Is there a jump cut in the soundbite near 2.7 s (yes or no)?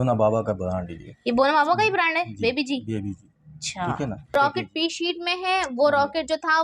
no